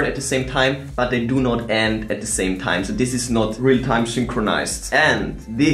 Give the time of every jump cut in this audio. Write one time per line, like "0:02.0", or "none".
none